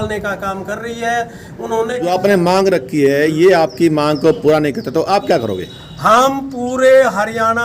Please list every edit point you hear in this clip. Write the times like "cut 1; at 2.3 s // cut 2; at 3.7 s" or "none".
cut 1; at 2.1 s